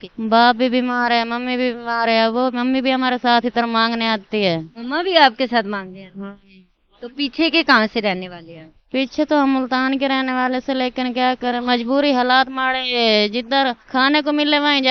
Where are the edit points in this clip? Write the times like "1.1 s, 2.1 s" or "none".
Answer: none

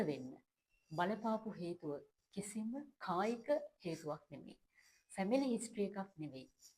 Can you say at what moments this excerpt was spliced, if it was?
none

